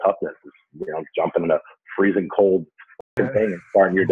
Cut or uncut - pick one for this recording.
uncut